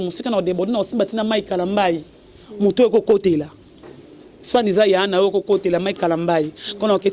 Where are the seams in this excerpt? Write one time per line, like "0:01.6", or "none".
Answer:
none